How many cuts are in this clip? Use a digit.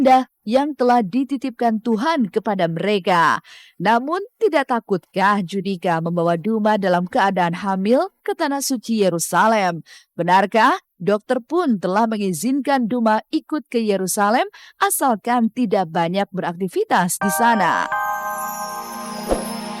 1